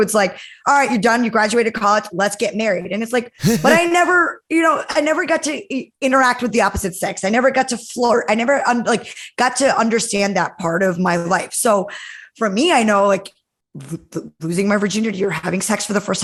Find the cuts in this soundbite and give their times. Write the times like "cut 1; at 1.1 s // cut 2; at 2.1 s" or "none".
none